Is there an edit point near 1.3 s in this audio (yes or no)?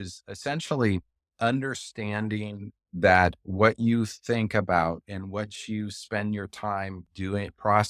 yes